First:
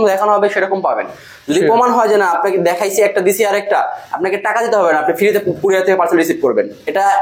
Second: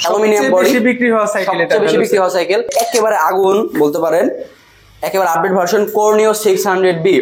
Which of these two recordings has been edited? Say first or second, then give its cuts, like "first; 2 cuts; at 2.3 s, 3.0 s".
second; 1 cut; at 2.7 s